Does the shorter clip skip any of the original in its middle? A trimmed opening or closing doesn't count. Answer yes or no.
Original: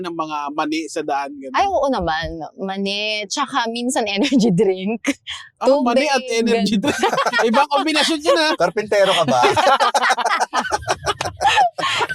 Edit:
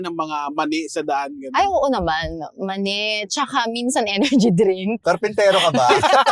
yes